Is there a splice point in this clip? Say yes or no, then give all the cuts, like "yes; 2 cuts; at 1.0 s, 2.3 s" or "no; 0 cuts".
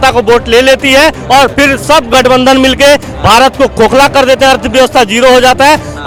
no; 0 cuts